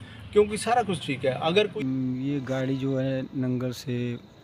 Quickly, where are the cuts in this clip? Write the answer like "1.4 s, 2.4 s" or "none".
1.7 s